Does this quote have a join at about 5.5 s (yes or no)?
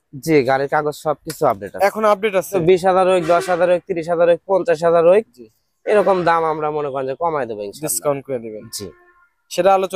no